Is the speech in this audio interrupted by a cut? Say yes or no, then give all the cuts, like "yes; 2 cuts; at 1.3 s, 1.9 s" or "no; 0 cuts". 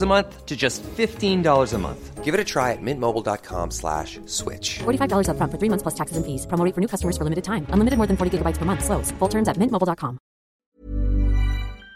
yes; 1 cut; at 10.7 s